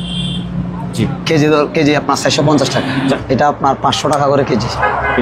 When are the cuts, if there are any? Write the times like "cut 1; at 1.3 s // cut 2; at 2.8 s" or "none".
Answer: cut 1; at 3.1 s